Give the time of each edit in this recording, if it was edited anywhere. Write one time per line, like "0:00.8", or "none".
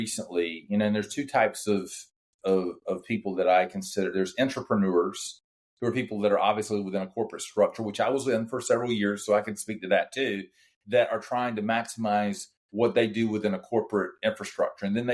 none